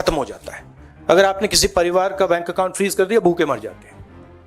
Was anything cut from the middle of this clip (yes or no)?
no